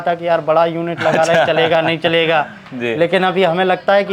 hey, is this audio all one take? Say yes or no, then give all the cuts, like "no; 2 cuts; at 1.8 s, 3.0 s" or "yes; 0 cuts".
yes; 0 cuts